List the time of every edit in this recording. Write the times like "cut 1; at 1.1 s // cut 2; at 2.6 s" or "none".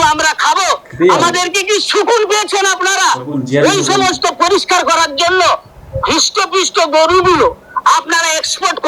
cut 1; at 5.9 s

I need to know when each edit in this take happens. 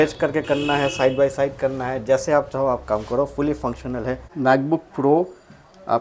cut 1; at 4.3 s

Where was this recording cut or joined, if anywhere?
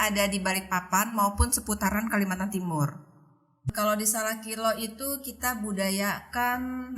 cut 1; at 3.6 s

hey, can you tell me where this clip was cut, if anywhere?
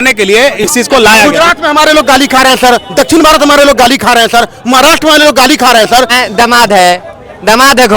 cut 1; at 1.3 s // cut 2; at 6.2 s

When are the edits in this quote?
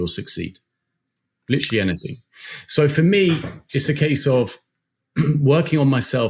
none

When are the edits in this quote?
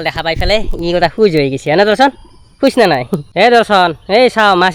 cut 1; at 3.3 s

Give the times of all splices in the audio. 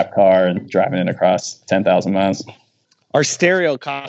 cut 1; at 2.8 s

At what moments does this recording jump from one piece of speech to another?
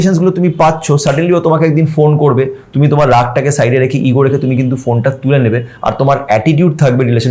none

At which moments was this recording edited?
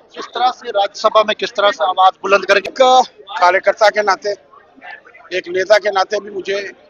cut 1; at 2.7 s

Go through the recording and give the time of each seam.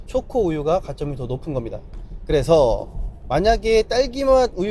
none

